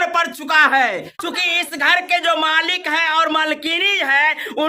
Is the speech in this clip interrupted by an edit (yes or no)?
yes